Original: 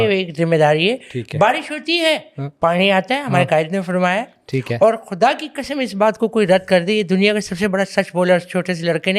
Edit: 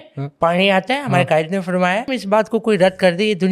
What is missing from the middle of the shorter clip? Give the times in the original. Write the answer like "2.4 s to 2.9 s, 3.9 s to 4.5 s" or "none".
4.3 s to 5.8 s